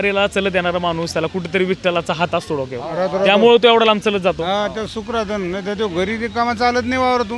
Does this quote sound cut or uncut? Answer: uncut